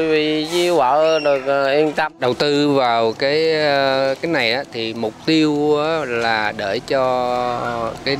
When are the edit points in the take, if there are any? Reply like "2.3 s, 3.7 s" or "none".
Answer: 2.1 s